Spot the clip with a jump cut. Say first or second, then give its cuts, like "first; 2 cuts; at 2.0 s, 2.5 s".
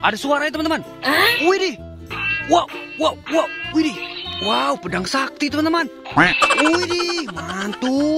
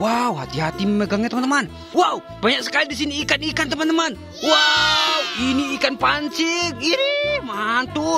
second; 1 cut; at 1.8 s